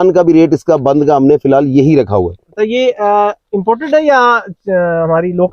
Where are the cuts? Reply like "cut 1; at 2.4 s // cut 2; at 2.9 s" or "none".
cut 1; at 2.5 s